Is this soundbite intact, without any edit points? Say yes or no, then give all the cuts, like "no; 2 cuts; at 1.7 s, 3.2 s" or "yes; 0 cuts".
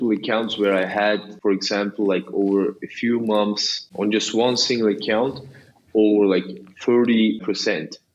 no; 3 cuts; at 1.3 s, 3.8 s, 7.4 s